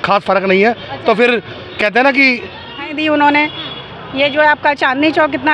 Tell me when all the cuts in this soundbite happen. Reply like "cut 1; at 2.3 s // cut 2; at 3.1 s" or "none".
cut 1; at 2.9 s